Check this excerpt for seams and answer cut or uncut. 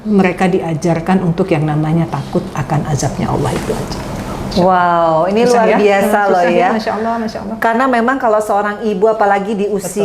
uncut